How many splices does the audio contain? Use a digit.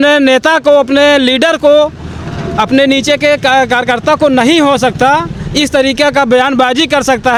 0